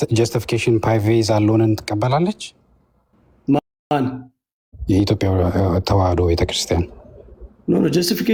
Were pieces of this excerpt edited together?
no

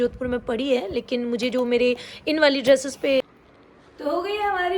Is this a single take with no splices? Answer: no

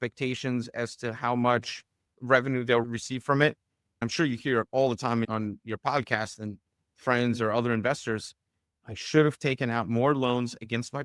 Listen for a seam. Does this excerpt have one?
yes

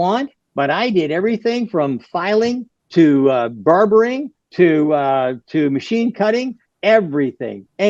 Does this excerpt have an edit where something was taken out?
no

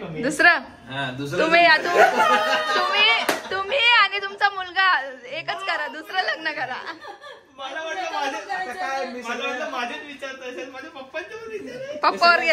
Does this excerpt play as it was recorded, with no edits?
yes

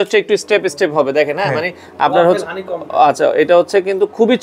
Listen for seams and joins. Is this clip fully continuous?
yes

